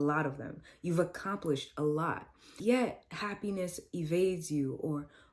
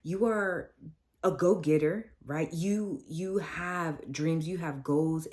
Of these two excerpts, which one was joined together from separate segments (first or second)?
first